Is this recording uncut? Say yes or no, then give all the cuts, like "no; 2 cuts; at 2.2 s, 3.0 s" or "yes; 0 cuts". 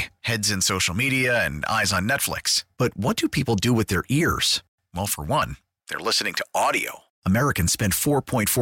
yes; 0 cuts